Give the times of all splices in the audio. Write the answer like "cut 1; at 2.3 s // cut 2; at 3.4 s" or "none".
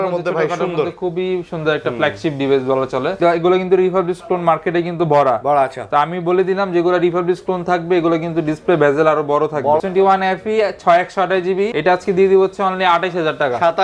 cut 1; at 3.1 s // cut 2; at 9.9 s // cut 3; at 11.7 s